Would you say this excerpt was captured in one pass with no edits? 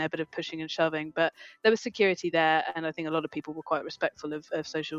yes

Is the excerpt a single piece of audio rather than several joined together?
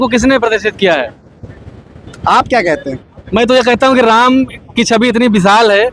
yes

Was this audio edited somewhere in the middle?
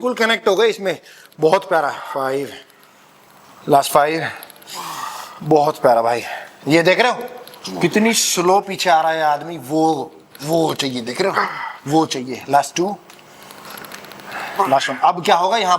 no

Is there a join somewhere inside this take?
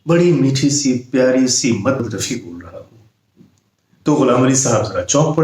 yes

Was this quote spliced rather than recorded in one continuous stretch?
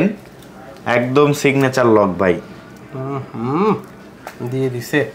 no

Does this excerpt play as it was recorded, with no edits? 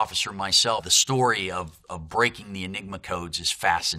yes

